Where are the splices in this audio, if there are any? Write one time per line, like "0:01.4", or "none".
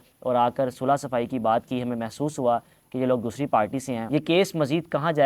0:04.0